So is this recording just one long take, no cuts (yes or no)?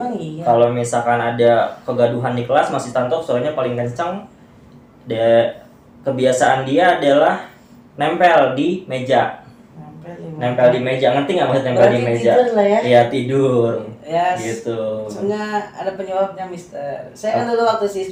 yes